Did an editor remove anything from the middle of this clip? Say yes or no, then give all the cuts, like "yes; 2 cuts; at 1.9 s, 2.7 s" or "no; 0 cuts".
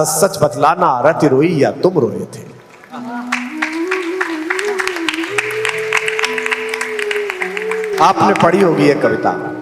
no; 0 cuts